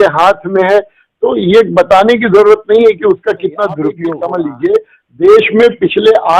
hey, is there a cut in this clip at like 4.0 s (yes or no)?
yes